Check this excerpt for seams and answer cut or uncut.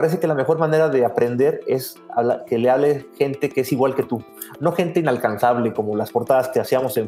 uncut